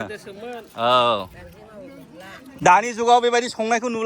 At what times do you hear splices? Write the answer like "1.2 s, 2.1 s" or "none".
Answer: 2.5 s